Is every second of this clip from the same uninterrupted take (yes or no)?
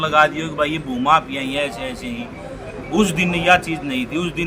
yes